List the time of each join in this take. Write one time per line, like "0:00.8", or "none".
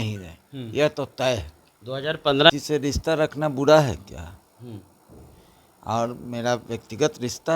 0:02.5

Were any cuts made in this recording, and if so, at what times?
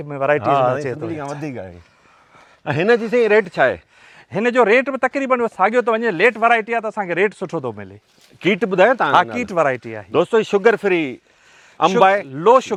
none

